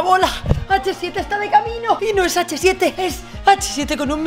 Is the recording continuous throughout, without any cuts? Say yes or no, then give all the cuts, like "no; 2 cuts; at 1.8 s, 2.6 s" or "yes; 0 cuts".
no; 2 cuts; at 2.0 s, 3.0 s